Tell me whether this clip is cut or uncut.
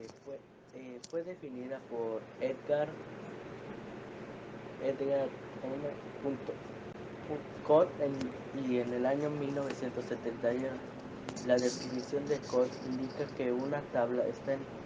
cut